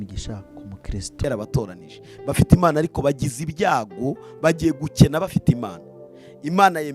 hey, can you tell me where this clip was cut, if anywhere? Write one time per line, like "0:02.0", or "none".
0:01.2